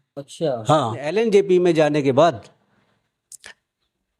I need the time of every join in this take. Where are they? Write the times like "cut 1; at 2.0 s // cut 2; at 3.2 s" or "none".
cut 1; at 1.1 s